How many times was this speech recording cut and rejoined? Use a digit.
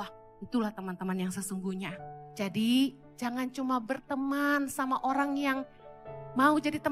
2